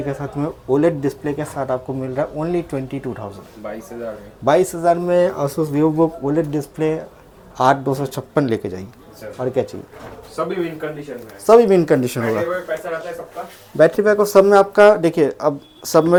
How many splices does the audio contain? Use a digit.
0